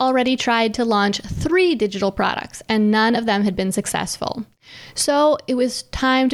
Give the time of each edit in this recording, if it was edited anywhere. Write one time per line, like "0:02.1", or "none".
none